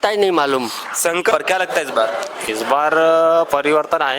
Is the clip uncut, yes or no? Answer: no